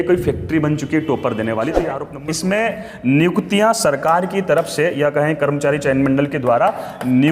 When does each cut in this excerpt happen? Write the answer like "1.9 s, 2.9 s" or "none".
2.1 s

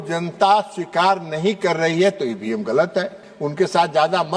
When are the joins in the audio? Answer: 3.3 s

